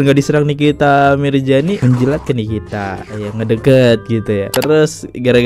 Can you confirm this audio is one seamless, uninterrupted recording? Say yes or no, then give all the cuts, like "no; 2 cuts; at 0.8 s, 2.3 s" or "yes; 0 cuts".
yes; 0 cuts